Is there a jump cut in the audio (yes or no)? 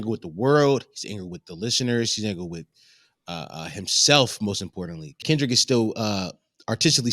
yes